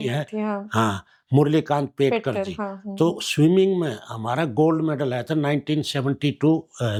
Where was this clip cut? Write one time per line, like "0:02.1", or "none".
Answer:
none